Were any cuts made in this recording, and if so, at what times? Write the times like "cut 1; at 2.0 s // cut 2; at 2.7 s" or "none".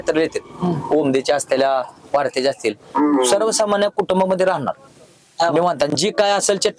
none